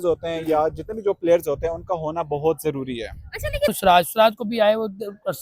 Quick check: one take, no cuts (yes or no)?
no